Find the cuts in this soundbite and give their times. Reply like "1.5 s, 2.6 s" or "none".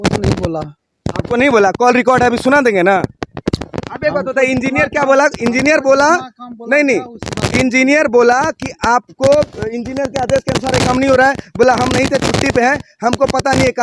none